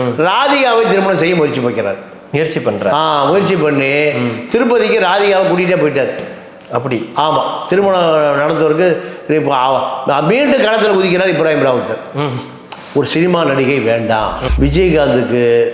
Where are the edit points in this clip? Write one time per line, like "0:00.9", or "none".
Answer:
0:14.4